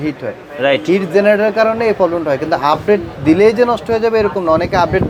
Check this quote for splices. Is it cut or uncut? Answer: uncut